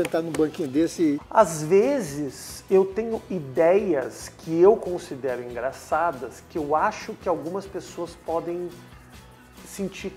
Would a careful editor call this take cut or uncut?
cut